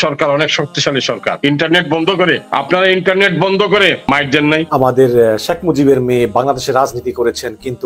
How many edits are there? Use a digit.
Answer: 3